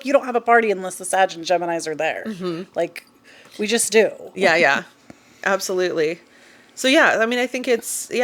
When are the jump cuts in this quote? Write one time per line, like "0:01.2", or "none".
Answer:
none